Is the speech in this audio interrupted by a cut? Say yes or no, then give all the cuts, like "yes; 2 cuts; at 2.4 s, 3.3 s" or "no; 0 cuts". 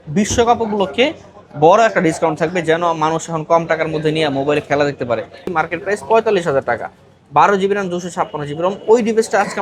yes; 1 cut; at 5.5 s